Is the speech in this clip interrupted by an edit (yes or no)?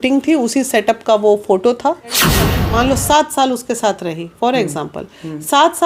yes